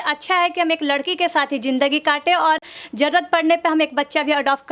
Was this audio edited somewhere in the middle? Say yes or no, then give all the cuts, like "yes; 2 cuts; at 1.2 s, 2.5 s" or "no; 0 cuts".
no; 0 cuts